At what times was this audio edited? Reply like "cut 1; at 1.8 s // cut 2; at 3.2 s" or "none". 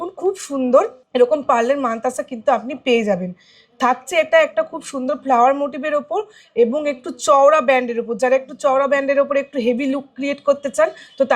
cut 1; at 1.0 s